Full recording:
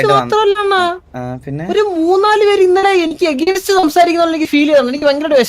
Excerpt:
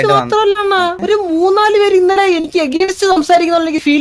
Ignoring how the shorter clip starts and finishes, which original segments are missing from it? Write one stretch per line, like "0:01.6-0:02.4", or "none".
0:01.0-0:01.6